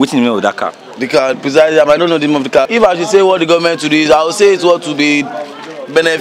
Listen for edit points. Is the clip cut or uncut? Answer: cut